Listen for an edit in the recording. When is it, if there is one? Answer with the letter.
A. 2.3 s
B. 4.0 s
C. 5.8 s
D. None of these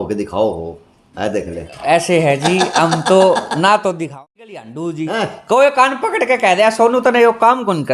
B